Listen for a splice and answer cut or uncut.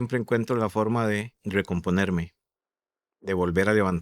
cut